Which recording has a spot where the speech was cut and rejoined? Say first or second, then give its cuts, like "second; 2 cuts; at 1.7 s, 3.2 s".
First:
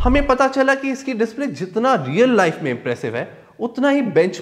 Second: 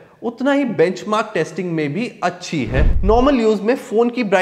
second; 1 cut; at 2.9 s